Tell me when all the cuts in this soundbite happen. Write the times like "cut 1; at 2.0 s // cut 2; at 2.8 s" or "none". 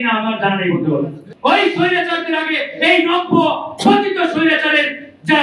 cut 1; at 1.2 s